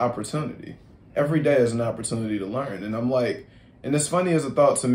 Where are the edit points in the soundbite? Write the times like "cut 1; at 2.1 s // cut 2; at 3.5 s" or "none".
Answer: none